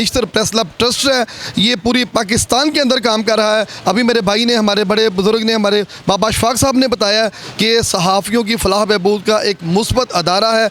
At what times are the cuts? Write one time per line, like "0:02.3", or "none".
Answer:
none